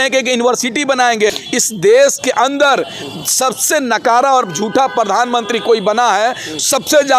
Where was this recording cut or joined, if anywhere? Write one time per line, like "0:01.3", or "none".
0:01.4